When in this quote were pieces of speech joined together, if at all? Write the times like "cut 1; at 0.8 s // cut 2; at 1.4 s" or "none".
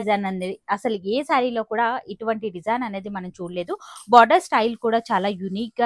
none